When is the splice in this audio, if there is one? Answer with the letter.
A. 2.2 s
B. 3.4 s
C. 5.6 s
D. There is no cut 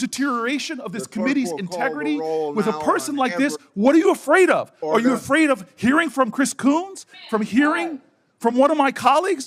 D